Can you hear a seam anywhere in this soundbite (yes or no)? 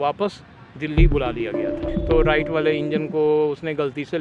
yes